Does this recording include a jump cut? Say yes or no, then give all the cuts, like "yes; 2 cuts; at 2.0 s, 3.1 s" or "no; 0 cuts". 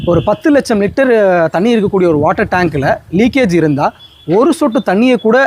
no; 0 cuts